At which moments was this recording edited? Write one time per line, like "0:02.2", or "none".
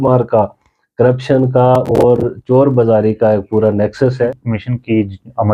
0:04.5